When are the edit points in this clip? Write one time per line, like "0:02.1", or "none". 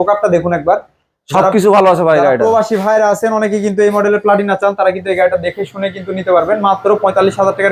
none